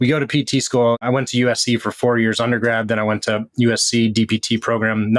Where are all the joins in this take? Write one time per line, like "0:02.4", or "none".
0:01.0